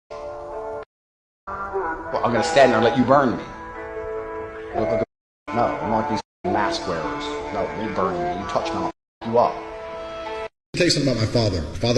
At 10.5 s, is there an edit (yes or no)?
yes